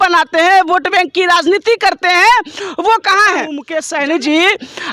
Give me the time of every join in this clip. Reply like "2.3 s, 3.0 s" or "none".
3.7 s

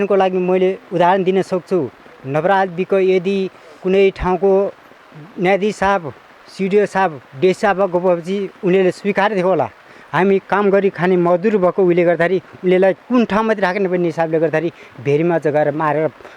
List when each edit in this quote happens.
none

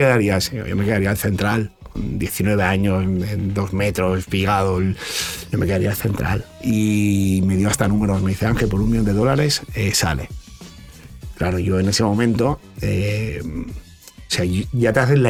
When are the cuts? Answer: none

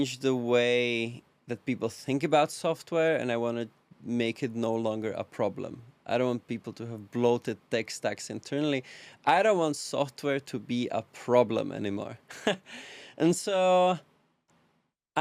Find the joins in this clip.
none

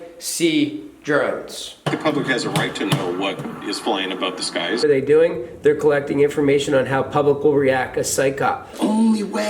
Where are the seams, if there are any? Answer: 1.9 s, 4.8 s, 8.7 s

